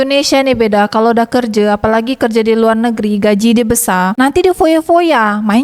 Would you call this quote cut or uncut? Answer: uncut